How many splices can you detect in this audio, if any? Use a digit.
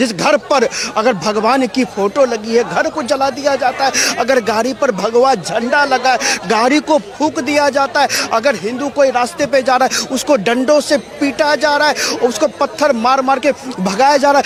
0